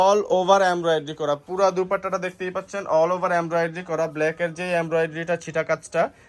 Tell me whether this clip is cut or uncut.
uncut